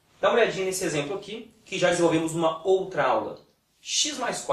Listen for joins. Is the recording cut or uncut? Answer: cut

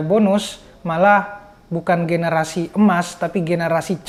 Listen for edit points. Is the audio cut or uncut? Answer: uncut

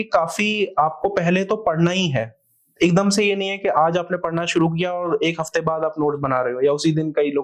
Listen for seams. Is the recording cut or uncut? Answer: uncut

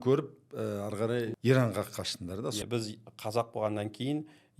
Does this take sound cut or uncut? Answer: cut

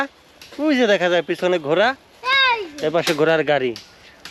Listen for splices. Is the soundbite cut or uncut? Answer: uncut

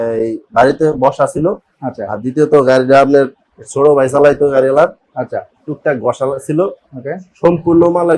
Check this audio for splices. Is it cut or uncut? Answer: uncut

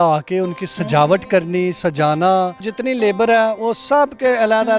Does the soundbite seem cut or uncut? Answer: cut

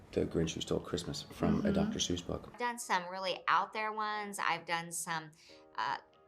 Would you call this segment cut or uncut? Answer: cut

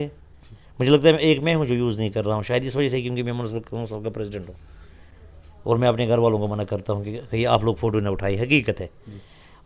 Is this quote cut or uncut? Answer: uncut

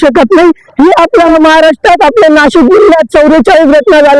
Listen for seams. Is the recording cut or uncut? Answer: cut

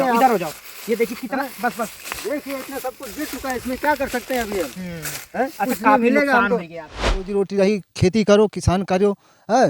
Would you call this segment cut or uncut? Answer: cut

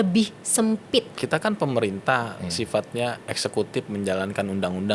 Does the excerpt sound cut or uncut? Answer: cut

